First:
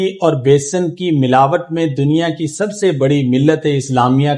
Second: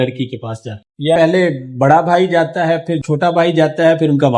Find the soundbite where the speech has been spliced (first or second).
second